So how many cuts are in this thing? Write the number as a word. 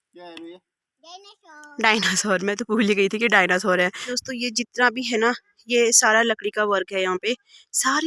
one